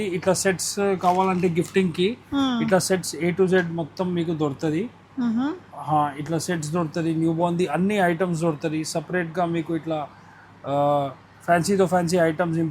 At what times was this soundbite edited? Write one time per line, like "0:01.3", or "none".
none